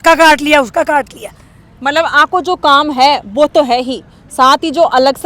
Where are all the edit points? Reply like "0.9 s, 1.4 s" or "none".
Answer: none